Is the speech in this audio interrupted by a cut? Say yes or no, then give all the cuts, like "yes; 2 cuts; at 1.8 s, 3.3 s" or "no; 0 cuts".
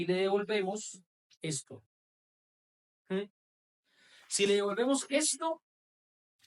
no; 0 cuts